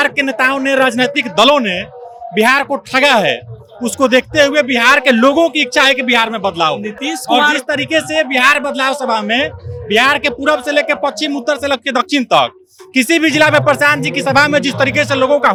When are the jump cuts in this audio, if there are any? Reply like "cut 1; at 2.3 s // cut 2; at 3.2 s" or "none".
none